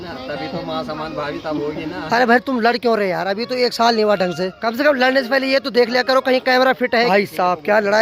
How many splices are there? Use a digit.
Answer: 2